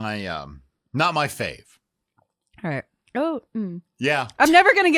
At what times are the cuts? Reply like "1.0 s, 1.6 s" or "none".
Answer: none